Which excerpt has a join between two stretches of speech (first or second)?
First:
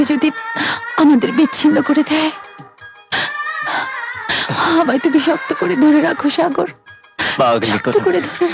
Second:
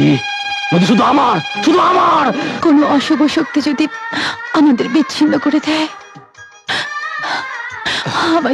second